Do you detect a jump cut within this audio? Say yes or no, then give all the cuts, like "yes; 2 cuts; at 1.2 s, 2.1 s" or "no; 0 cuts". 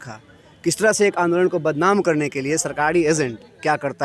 no; 0 cuts